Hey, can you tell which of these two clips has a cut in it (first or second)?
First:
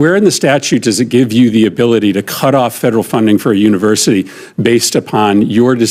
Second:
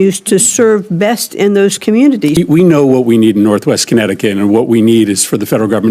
second